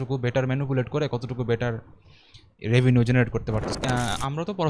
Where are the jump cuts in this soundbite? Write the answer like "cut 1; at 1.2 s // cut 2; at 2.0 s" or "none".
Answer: cut 1; at 3.7 s